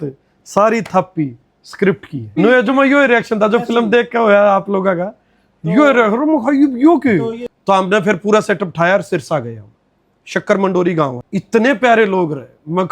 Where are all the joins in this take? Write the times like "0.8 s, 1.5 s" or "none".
2.4 s, 7.5 s, 11.2 s